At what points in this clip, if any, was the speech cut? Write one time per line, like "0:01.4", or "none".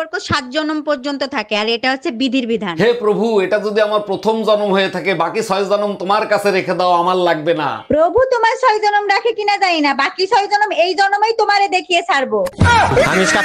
none